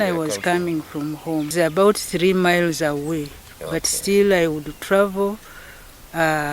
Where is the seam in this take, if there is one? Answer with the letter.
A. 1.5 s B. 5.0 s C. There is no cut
A